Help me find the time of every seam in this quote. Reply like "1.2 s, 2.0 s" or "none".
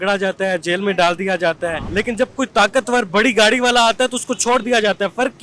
1.8 s

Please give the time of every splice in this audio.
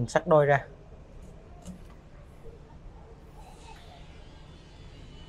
none

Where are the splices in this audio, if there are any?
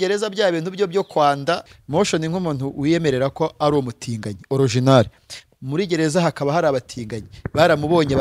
1.7 s

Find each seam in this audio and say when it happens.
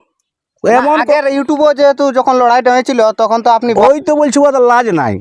3.8 s

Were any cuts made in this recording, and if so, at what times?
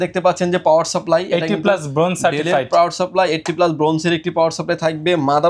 none

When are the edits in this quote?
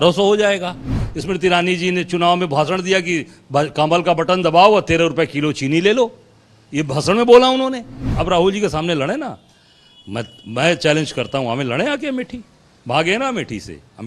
1.1 s, 8.1 s

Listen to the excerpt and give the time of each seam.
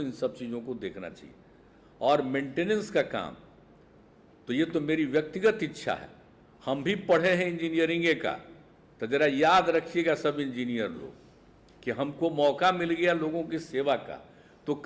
none

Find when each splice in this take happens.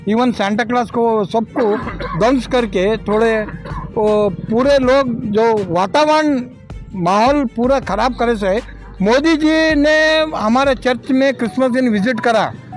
8.7 s

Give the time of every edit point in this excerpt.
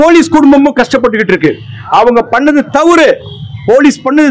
none

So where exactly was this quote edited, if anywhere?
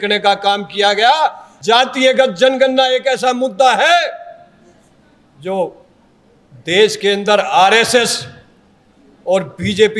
1.5 s

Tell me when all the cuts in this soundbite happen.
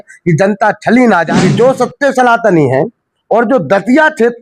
1.3 s

